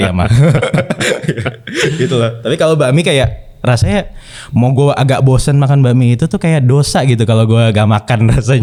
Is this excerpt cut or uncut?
uncut